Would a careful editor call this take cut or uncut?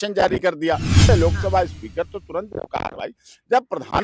cut